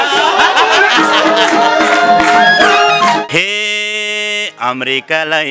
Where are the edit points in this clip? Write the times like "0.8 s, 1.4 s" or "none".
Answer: 3.2 s

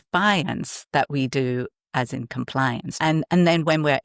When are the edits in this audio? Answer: 2.9 s

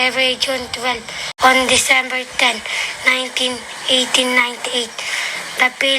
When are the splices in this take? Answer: 1.4 s

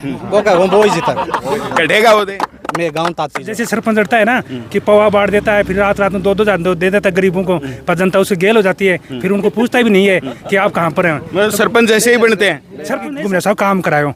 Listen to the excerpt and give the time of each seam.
3.6 s, 13.1 s

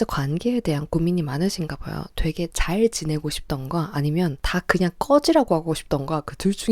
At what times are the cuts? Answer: 4.4 s

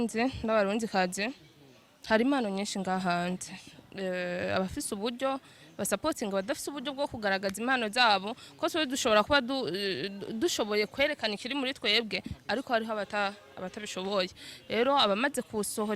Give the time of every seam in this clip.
none

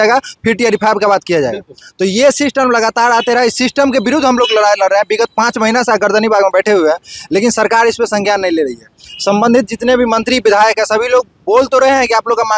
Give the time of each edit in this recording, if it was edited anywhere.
none

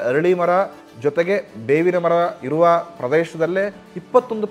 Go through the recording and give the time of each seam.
none

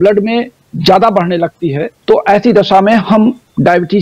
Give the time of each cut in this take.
1.9 s

